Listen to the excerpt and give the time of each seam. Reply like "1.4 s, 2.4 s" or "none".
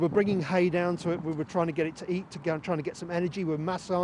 none